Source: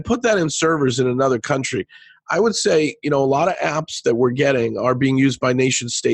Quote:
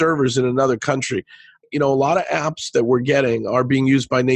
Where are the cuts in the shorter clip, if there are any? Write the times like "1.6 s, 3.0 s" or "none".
1.6 s